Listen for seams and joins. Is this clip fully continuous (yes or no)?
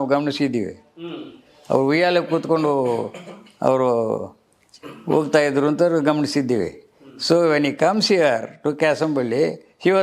yes